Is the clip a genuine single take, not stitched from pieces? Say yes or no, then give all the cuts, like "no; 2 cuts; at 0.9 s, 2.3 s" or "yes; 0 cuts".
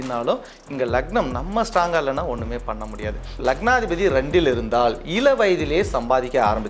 no; 1 cut; at 3.4 s